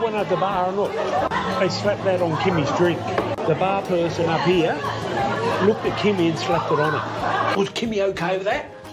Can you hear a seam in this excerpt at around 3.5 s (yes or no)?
no